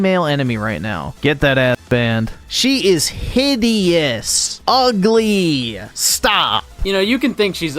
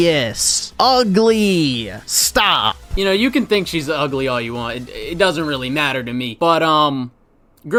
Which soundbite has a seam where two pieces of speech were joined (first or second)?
first